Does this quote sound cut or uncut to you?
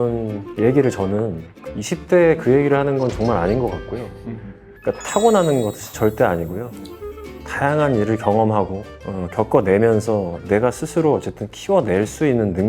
cut